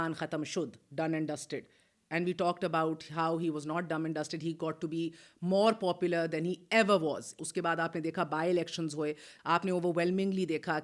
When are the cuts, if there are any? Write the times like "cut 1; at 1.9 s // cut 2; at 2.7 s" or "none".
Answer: cut 1; at 7.4 s // cut 2; at 9.3 s